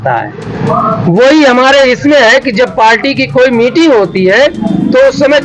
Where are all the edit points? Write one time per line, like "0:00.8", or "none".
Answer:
none